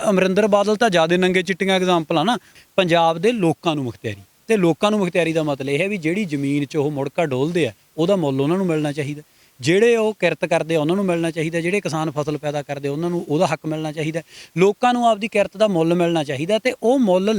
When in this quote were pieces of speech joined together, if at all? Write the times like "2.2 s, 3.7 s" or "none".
2.5 s

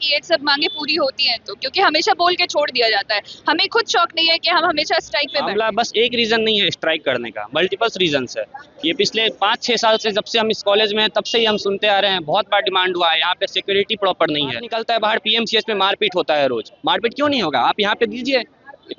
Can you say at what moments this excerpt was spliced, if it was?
5.5 s, 14.7 s

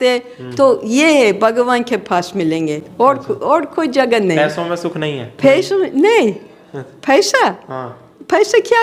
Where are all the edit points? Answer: none

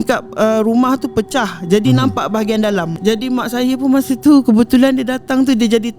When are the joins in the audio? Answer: 2.9 s

